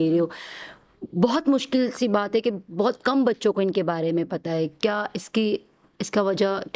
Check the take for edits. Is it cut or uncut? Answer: uncut